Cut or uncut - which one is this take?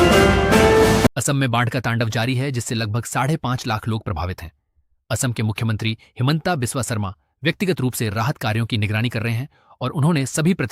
cut